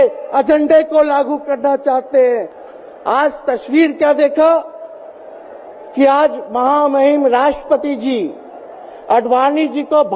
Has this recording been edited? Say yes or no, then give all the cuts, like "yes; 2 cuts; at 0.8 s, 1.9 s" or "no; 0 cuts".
yes; 1 cut; at 2.6 s